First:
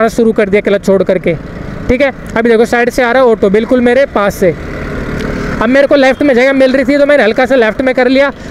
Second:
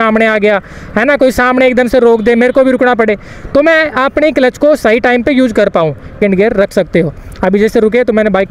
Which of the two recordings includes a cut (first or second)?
second